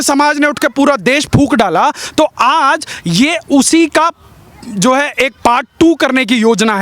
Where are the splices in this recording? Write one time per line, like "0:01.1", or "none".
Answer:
none